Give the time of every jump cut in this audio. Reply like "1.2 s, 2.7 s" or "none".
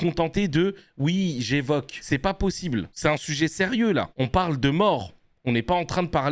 none